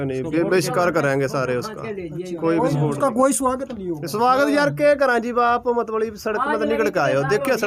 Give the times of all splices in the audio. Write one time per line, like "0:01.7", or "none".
none